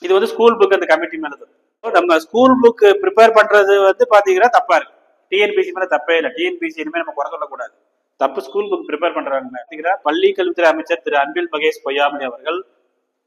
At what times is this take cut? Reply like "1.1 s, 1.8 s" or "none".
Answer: 1.9 s, 9.8 s

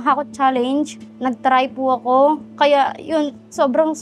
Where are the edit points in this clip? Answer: none

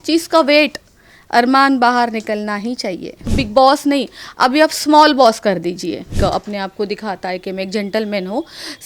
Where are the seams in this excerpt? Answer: 3.3 s, 6.1 s

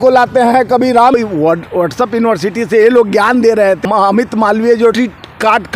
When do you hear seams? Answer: 1.1 s, 3.8 s, 4.9 s

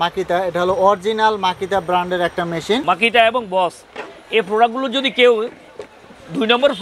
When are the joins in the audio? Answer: 2.8 s

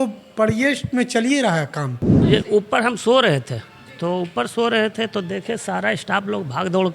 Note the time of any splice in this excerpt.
2.2 s

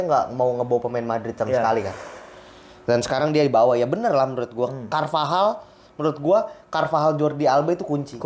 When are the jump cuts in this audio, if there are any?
none

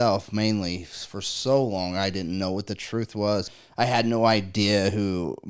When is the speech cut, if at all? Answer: 3.5 s

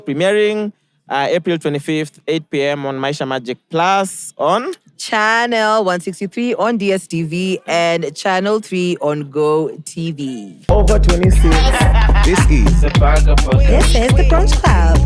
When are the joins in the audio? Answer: 10.6 s

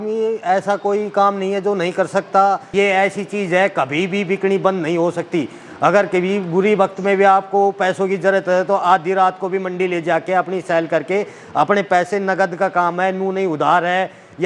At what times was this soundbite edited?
2.7 s

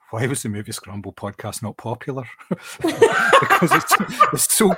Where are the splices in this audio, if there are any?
none

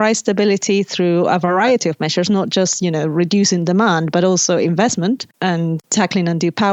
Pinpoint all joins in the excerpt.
none

